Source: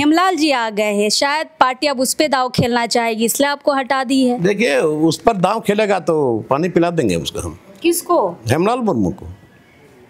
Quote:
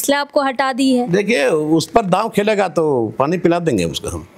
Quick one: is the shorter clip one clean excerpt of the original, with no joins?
yes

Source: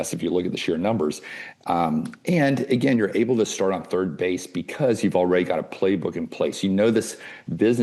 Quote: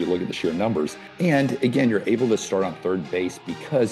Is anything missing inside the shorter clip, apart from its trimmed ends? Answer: yes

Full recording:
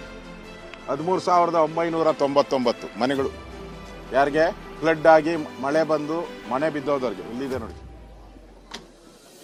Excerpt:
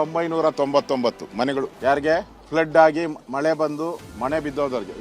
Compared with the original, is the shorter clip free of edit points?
no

